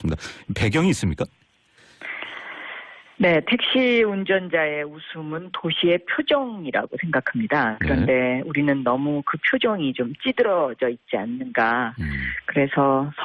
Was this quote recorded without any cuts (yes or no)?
yes